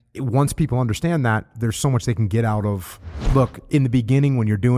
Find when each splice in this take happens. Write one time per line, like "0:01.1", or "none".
0:03.2